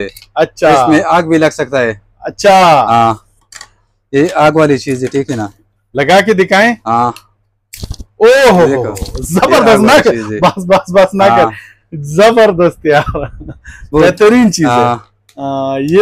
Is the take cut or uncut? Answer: uncut